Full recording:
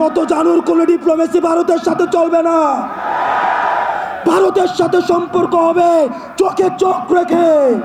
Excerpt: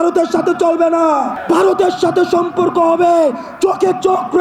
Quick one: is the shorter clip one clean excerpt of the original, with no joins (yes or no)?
no